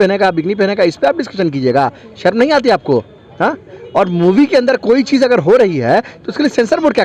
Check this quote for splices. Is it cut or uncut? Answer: uncut